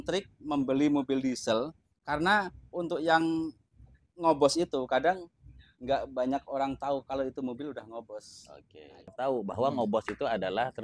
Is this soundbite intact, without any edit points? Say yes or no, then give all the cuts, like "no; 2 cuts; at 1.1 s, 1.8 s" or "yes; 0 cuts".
no; 1 cut; at 9.1 s